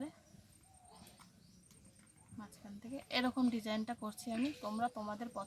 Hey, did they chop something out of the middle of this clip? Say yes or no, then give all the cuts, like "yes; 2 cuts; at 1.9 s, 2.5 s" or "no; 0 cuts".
no; 0 cuts